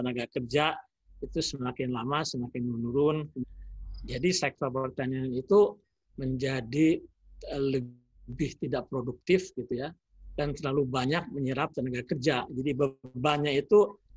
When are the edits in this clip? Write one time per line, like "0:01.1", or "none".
0:03.4